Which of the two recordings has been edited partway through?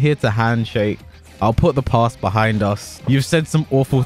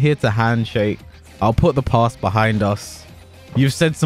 first; 1 cut; at 2.9 s

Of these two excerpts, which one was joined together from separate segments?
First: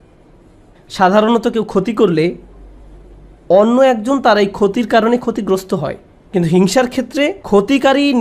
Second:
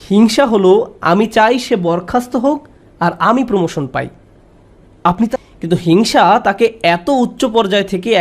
second; 1 cut; at 5.3 s

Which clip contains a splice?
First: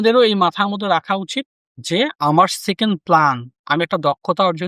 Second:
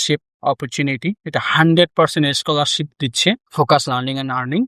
second; 1 cut; at 3.5 s

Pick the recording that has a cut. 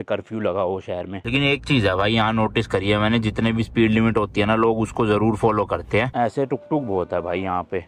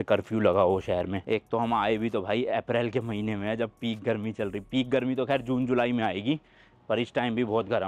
first; 2 cuts; at 1.2 s, 6.1 s

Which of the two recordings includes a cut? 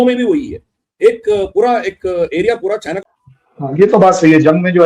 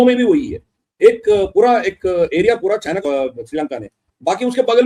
first; 1 cut; at 3.0 s

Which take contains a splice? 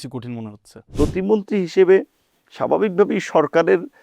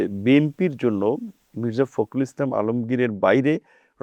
first; 1 cut; at 0.9 s

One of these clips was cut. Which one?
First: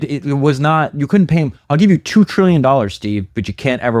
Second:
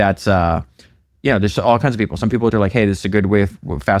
second; 1 cut; at 2.5 s

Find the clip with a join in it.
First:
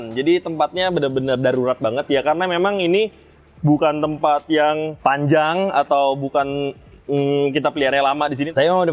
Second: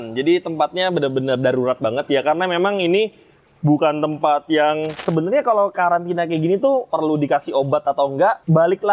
second; 1 cut; at 5.0 s

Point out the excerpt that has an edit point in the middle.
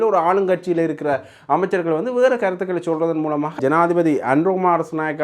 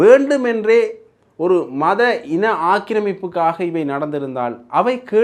first; 1 cut; at 3.6 s

